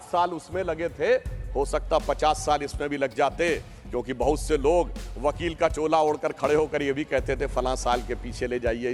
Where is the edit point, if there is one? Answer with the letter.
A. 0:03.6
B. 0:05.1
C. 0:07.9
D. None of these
D